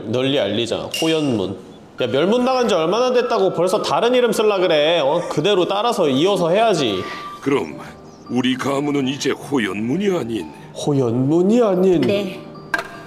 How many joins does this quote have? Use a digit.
2